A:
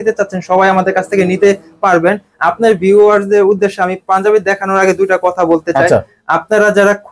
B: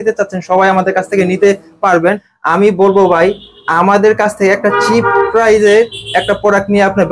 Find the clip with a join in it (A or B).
B